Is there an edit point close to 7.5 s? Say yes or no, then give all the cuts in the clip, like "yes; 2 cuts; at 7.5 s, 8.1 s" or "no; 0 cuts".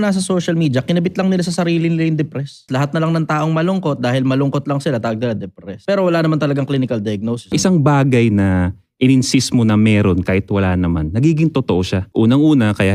yes; 4 cuts; at 2.7 s, 5.8 s, 7.5 s, 12.0 s